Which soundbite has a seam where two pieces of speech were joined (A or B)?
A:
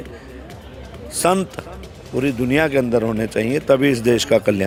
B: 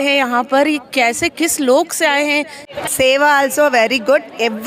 B